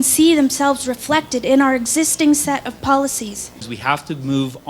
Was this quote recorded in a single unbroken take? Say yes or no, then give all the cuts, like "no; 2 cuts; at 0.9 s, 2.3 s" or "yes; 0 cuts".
no; 1 cut; at 3.7 s